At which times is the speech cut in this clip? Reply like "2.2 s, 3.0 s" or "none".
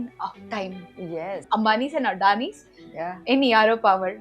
1.3 s